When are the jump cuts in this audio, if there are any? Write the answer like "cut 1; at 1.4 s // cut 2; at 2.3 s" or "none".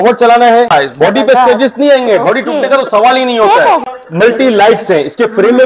cut 1; at 0.7 s // cut 2; at 3.9 s